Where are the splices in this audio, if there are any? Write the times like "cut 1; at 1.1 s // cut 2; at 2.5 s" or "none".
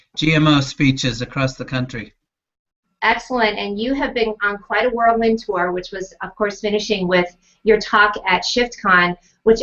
cut 1; at 7.3 s